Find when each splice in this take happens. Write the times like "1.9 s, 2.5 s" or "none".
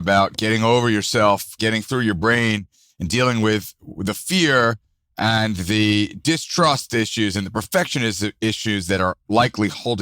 1.6 s